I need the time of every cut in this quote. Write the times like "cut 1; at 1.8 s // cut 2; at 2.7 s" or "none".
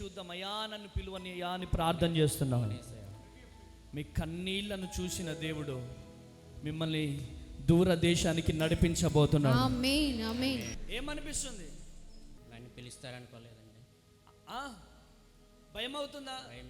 cut 1; at 10.7 s // cut 2; at 12.4 s